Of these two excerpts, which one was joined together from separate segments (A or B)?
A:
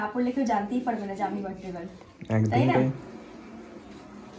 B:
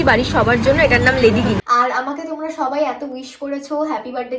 B